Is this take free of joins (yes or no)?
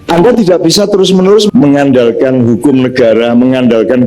no